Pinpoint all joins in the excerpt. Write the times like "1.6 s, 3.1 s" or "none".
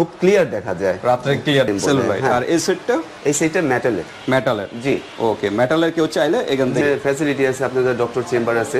1.7 s, 6.8 s